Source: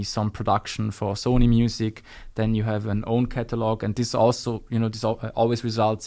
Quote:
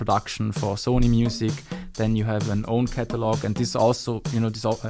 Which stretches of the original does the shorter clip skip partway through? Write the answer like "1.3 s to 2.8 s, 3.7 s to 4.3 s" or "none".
none